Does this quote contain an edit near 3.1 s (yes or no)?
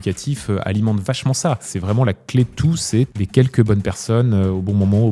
yes